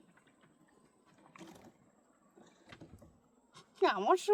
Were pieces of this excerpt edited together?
no; 0 cuts

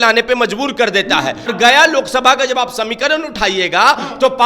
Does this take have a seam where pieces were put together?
yes; 1 cut; at 1.5 s

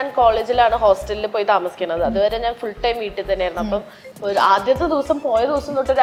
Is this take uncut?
yes; 0 cuts

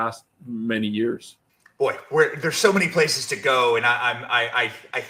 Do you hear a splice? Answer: no; 0 cuts

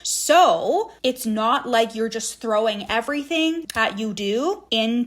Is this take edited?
yes; 1 cut; at 3.7 s

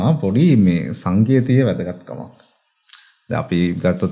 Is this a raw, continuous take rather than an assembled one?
yes; 0 cuts

